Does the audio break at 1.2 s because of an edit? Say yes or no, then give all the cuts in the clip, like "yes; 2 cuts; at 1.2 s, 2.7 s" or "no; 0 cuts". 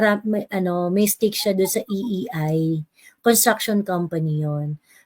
no; 0 cuts